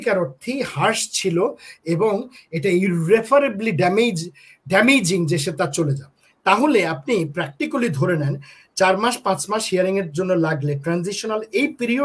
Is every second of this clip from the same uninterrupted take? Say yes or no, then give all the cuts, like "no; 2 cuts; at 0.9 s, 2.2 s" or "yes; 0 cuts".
yes; 0 cuts